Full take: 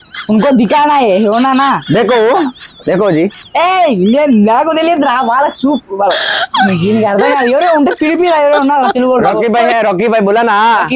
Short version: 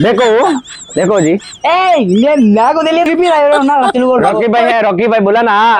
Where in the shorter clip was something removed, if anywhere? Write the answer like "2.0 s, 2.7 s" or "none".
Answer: 3.1 s